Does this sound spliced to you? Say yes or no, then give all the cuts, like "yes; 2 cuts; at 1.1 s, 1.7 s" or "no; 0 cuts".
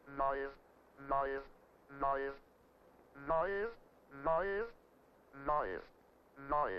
yes; 1 cut; at 2.6 s